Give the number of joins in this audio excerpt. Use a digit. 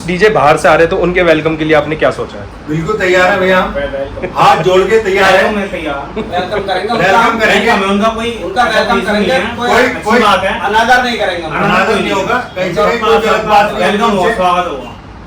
0